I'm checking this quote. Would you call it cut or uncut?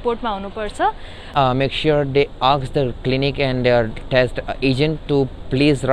cut